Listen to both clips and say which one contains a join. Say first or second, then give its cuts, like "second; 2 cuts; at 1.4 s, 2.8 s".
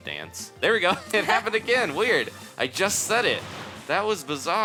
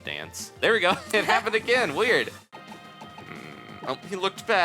second; 1 cut; at 2.5 s